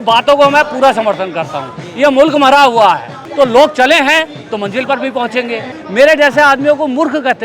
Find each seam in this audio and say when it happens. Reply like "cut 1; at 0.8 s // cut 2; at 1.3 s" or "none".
cut 1; at 3.2 s // cut 2; at 5.8 s